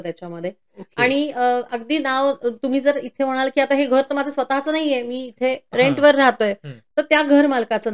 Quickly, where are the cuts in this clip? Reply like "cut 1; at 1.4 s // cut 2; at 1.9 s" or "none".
none

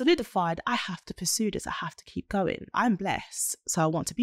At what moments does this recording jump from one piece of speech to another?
cut 1; at 2.7 s

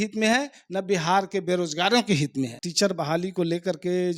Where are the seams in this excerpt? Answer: cut 1; at 2.6 s

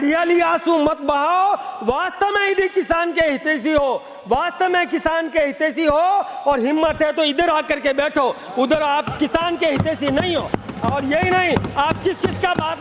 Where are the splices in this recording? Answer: none

